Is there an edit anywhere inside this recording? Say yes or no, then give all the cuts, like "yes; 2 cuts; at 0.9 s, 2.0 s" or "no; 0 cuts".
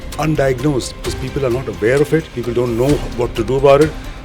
yes; 1 cut; at 2.9 s